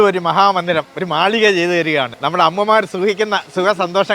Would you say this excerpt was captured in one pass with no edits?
no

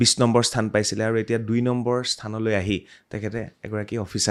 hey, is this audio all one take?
yes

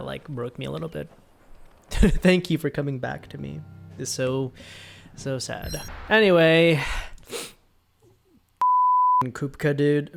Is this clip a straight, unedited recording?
yes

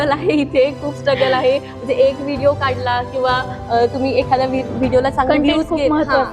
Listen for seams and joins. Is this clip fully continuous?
yes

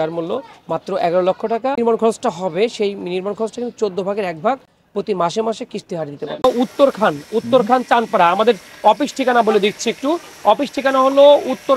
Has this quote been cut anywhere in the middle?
yes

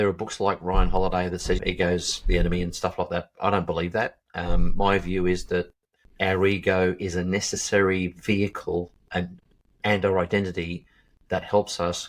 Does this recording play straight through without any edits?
no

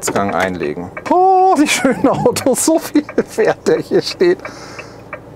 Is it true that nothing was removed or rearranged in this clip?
no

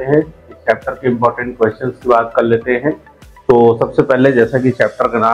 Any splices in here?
no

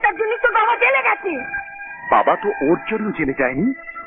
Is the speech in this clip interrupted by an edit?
no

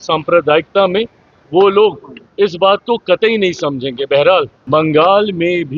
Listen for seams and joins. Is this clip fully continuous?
no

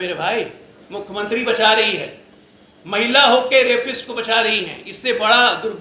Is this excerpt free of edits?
yes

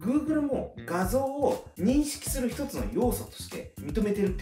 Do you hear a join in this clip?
no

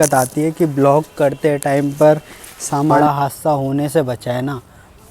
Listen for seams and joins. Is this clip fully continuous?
no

